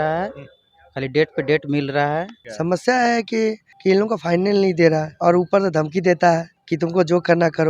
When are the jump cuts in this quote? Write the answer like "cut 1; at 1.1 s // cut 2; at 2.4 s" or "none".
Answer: cut 1; at 2.4 s // cut 2; at 3.7 s // cut 3; at 6.6 s